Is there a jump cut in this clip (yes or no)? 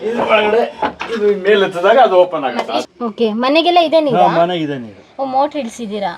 yes